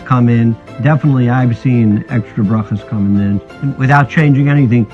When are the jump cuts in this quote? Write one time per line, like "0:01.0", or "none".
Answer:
0:03.6

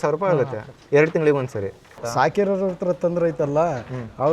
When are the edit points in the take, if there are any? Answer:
0:02.0

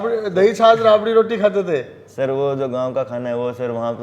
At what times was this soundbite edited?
none

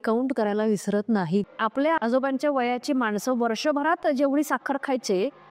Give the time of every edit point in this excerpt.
0:01.8

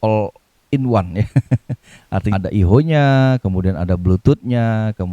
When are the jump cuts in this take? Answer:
0:02.3

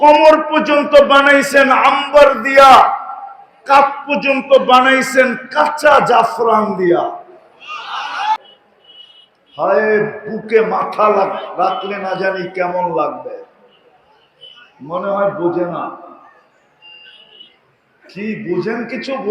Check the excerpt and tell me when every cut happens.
0:08.4

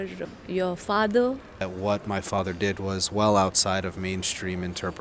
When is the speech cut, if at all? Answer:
0:01.7

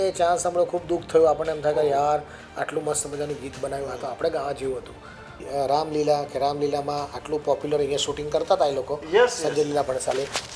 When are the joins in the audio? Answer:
0:05.4

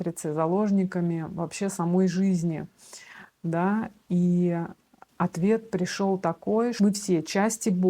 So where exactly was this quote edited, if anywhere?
0:06.7

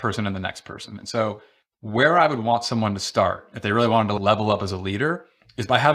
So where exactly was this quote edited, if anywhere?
0:04.2

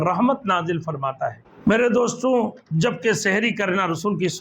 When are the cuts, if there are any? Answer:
0:01.5

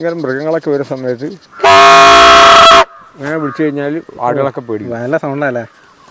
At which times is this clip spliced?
0:01.4

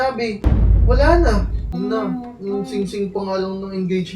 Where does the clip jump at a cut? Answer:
0:01.7

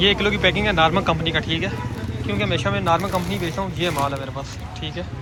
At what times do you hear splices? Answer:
none

